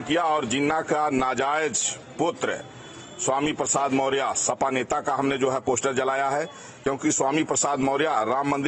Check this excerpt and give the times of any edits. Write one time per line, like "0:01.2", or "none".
0:06.6